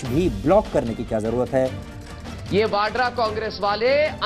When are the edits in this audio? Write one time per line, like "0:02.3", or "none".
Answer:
0:01.9